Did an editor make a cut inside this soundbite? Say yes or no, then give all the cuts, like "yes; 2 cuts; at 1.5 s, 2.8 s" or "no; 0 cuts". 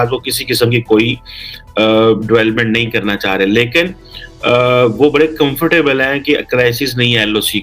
no; 0 cuts